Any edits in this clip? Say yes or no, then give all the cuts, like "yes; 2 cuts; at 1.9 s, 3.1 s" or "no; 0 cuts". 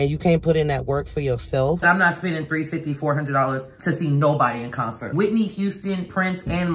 yes; 2 cuts; at 1.8 s, 5.1 s